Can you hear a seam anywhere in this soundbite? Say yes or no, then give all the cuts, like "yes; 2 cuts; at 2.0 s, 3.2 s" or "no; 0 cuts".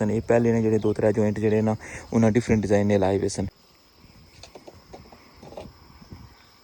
yes; 1 cut; at 3.6 s